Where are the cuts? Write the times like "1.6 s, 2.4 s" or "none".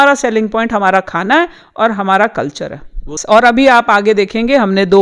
3.1 s